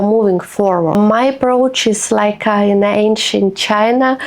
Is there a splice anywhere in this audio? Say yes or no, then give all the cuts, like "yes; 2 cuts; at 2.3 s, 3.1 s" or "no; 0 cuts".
yes; 1 cut; at 0.9 s